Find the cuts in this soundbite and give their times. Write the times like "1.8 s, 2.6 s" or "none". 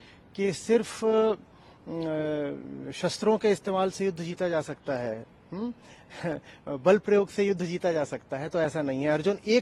none